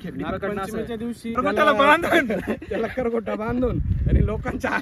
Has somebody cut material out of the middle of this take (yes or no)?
yes